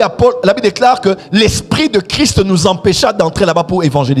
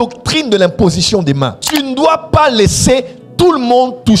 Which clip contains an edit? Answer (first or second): second